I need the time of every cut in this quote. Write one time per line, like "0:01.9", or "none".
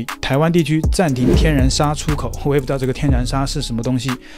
none